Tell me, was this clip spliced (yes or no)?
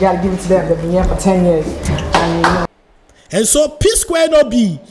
yes